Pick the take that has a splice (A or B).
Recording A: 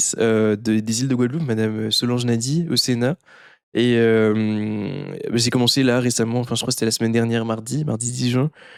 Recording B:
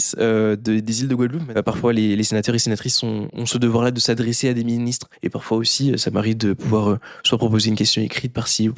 B